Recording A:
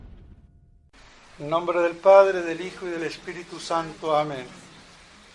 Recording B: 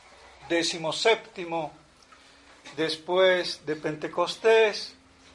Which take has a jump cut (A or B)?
B